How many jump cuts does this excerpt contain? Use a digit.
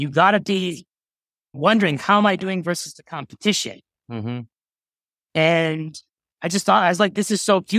1